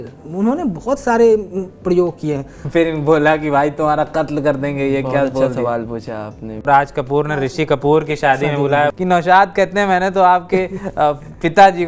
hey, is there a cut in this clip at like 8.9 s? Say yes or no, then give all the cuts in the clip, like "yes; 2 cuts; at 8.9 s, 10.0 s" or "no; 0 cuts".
yes; 3 cuts; at 2.6 s, 6.6 s, 8.9 s